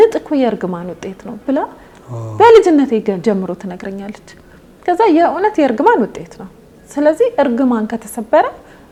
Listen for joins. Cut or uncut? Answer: uncut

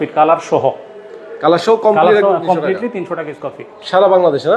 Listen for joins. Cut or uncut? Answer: uncut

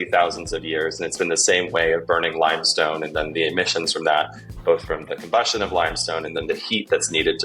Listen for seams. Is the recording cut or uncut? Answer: uncut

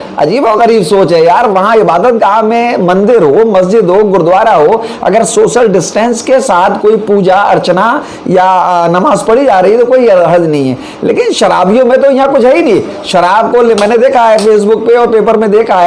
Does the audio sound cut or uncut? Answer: uncut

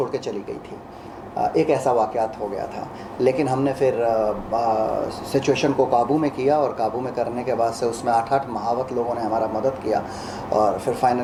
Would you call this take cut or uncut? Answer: uncut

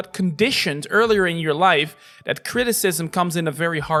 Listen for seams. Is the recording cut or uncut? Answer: uncut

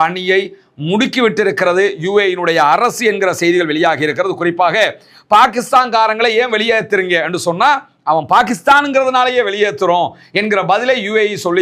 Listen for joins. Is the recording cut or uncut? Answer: uncut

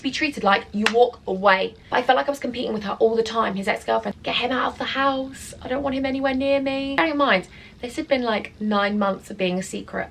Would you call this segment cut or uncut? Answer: cut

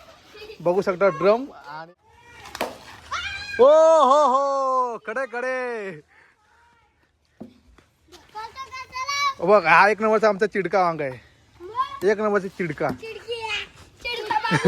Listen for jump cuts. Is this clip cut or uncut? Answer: cut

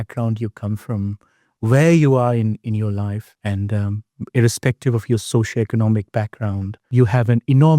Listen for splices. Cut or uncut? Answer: cut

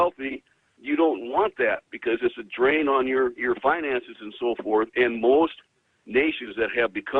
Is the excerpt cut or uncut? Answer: uncut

